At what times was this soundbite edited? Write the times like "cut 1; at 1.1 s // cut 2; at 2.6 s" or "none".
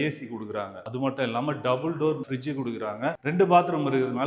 none